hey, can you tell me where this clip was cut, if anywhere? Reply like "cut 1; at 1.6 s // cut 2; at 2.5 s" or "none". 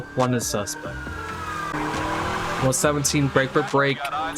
cut 1; at 1.7 s